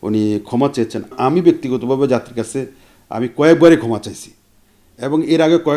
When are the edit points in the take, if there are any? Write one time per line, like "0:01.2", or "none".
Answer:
0:01.1